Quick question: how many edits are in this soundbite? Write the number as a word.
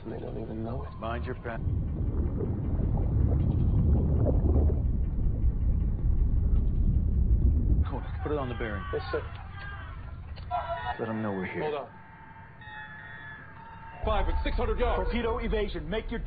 one